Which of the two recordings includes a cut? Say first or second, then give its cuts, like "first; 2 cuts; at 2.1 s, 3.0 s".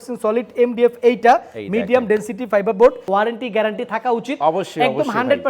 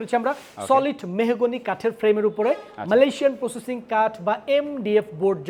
first; 1 cut; at 3.0 s